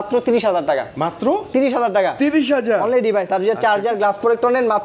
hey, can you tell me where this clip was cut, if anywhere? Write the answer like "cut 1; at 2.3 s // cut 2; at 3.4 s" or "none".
none